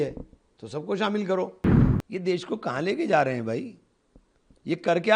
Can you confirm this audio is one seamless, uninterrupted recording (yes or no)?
no